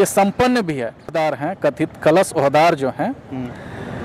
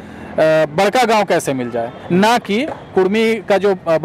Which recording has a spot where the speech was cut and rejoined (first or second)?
first